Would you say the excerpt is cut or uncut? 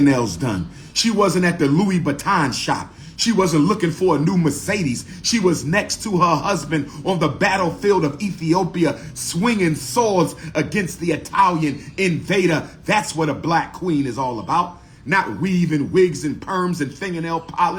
uncut